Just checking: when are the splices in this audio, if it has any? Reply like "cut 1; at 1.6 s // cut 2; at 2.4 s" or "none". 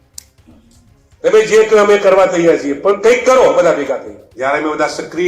cut 1; at 4.2 s